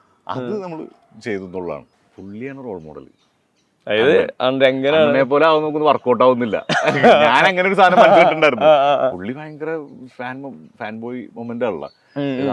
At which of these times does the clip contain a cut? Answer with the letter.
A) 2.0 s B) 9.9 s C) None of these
A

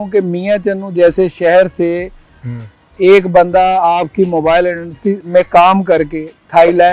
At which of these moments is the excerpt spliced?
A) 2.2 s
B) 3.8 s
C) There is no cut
C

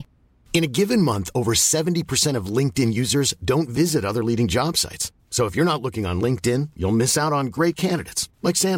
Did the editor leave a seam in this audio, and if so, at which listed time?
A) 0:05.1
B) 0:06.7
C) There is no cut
C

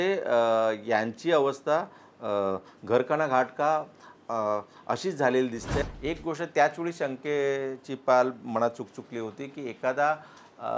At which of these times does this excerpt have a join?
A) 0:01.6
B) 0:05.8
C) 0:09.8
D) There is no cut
B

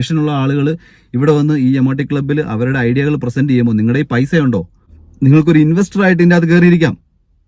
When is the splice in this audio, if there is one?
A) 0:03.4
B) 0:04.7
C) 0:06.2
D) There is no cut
D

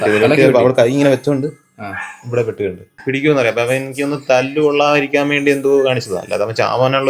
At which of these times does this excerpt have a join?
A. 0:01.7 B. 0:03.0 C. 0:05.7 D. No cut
B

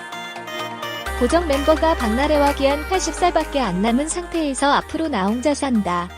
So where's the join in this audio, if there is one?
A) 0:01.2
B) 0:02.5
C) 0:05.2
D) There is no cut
A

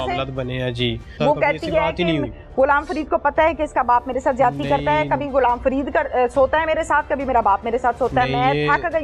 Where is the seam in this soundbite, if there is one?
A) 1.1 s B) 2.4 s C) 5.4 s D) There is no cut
A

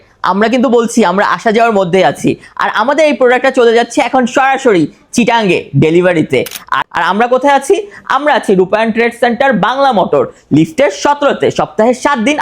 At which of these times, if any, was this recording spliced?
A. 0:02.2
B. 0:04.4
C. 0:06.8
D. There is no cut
C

